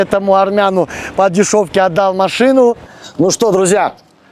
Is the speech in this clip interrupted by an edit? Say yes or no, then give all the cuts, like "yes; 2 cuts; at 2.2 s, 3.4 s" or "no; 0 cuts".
yes; 1 cut; at 2.8 s